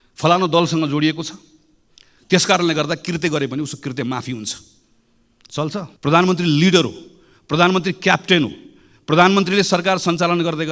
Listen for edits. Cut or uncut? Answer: cut